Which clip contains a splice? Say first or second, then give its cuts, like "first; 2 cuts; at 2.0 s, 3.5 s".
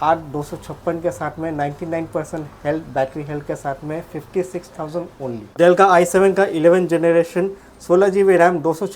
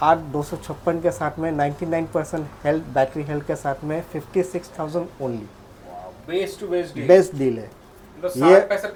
first; 1 cut; at 5.4 s